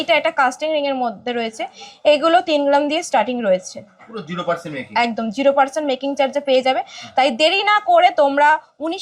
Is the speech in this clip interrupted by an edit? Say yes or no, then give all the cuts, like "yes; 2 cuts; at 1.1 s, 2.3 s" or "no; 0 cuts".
no; 0 cuts